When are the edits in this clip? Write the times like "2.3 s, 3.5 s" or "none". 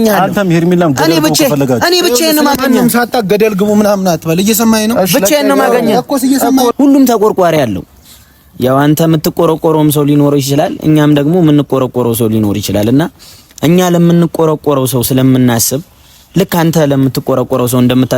6.7 s